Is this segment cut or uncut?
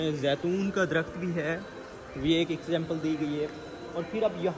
uncut